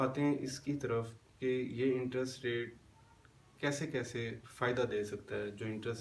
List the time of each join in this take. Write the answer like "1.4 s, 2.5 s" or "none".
none